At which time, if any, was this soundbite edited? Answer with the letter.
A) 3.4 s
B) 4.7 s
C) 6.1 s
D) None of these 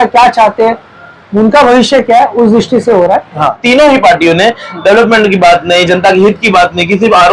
A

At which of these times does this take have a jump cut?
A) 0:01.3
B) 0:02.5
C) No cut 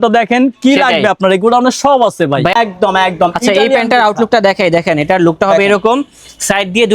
B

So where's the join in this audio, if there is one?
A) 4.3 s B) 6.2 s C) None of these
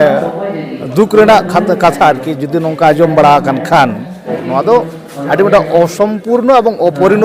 A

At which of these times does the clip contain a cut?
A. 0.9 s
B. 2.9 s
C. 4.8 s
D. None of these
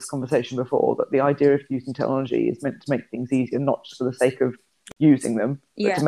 C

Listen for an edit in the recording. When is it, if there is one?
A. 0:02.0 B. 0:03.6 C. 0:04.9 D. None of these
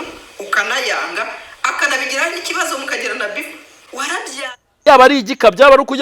C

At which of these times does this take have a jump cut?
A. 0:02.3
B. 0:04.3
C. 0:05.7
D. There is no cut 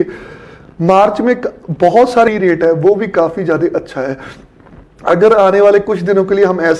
A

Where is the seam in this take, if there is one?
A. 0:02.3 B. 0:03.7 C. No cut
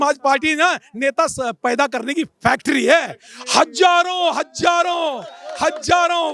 C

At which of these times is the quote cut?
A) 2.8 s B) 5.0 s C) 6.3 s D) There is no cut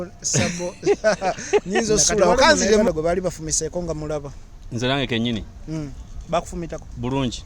A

